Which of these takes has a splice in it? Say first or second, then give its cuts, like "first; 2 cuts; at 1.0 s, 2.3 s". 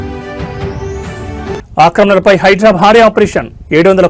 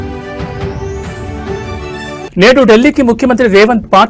first; 1 cut; at 1.6 s